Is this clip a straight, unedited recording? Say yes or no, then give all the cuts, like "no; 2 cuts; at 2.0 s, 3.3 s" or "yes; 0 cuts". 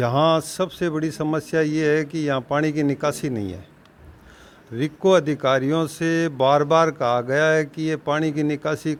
yes; 0 cuts